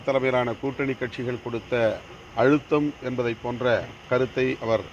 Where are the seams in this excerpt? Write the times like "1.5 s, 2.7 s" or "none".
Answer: 2.1 s, 3.9 s